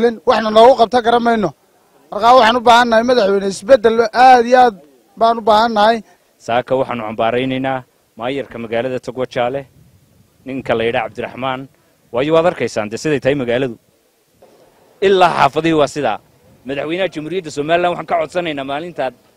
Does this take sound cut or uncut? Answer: uncut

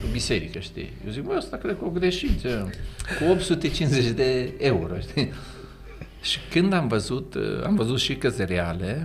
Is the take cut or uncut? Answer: uncut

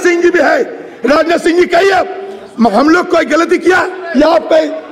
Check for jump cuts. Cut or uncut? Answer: uncut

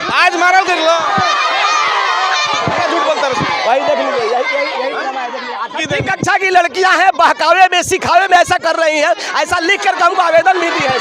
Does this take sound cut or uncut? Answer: cut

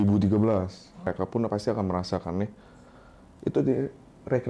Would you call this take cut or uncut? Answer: cut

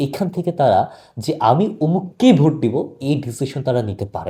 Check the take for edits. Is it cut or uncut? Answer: uncut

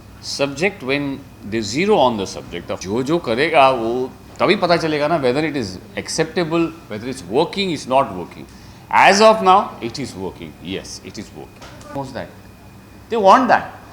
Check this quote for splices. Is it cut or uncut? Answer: cut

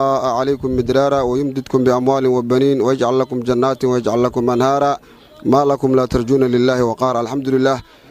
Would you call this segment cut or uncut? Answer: uncut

